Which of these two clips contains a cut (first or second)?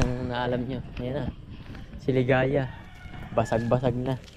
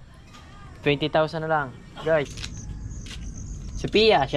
second